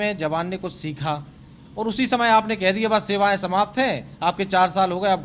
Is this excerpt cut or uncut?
uncut